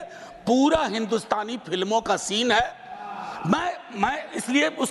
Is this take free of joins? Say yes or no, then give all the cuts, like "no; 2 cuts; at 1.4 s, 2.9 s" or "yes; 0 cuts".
yes; 0 cuts